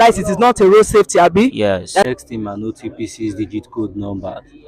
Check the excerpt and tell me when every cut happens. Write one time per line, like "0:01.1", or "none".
0:02.1